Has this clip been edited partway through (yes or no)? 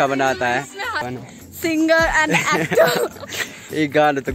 yes